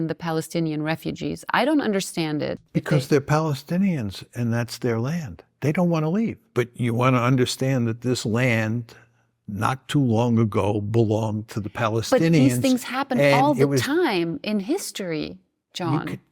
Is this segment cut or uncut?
cut